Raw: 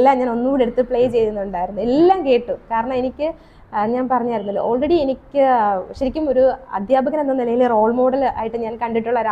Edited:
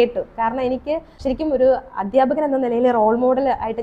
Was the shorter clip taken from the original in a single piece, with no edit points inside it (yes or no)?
no